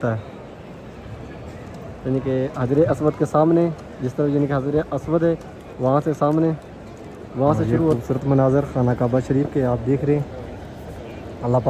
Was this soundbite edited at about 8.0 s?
yes; 1 cut; at 8.0 s

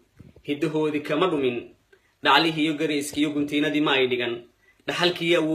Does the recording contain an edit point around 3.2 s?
yes; 1 cut; at 3.2 s

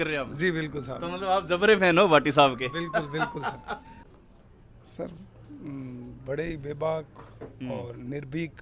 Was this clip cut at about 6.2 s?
no; 1 cut; at 3.9 s

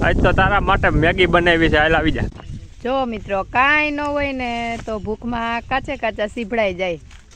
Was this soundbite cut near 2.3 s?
yes; 1 cut; at 2.3 s

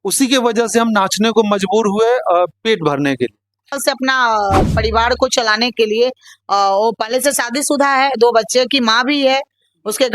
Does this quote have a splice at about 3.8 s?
yes; 1 cut; at 3.8 s

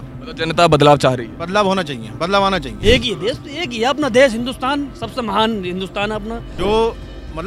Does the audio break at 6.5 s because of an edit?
yes; 2 cuts; at 2.7 s, 6.5 s

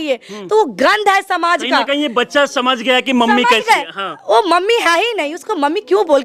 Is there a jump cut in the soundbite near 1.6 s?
no; 0 cuts

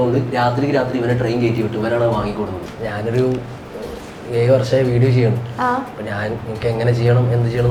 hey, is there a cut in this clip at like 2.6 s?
yes; 1 cut; at 2.6 s

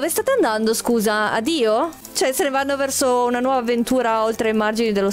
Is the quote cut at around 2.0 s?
yes; 1 cut; at 2.0 s

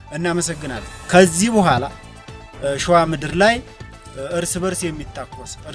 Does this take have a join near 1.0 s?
yes; 1 cut; at 1.0 s

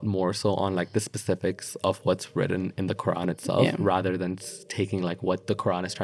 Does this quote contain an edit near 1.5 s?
no; 0 cuts

